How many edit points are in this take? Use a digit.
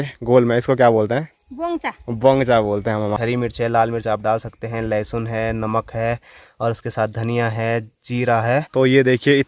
2